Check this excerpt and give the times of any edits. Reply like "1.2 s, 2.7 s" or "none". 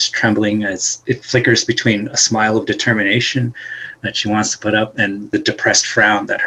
1.0 s, 5.3 s